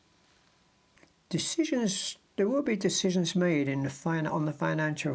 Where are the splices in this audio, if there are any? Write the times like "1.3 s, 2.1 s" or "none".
1.0 s